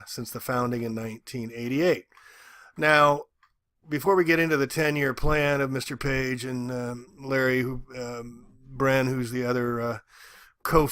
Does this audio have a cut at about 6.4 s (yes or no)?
yes